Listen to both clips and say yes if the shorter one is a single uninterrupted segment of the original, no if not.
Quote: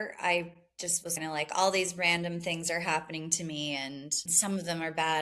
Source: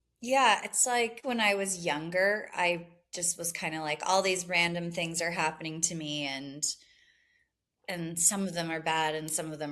no